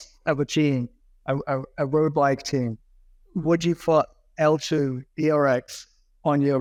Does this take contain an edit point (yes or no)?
no